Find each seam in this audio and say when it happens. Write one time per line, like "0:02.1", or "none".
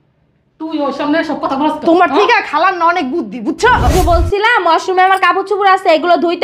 0:03.9